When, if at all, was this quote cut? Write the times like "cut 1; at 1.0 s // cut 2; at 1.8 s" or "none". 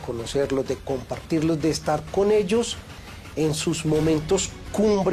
none